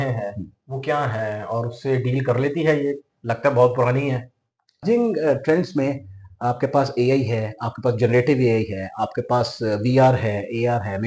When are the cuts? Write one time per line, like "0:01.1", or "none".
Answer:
0:04.8